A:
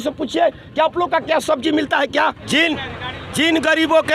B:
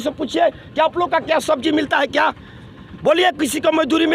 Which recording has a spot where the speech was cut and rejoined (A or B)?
A